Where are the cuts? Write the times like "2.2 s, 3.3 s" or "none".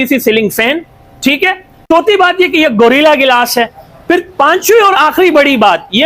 1.8 s